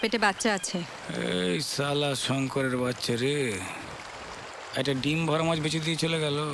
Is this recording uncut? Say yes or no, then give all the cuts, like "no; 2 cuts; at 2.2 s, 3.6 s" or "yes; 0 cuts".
no; 1 cut; at 1.0 s